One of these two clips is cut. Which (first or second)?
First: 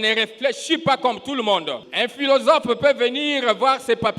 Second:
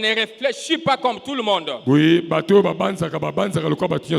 first